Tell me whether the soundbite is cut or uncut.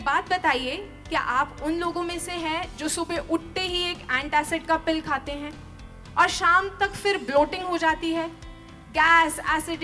uncut